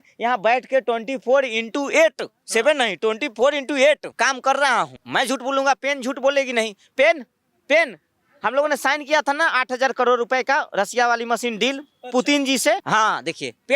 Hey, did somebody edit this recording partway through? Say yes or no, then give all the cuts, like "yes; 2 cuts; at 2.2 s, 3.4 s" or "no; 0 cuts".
yes; 3 cuts; at 4.1 s, 5.0 s, 12.8 s